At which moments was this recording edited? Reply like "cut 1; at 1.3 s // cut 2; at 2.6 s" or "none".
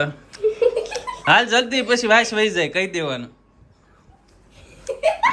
cut 1; at 4.4 s